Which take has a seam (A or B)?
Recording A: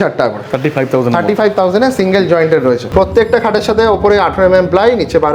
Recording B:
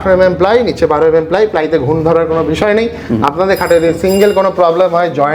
A